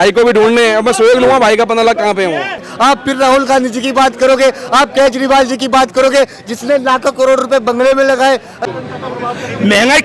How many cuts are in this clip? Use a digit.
2